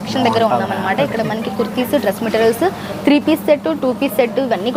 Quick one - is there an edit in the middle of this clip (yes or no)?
no